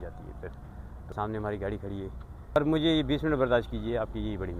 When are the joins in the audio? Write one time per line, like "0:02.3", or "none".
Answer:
0:01.1
0:02.6